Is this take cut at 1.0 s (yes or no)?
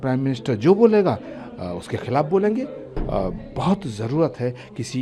no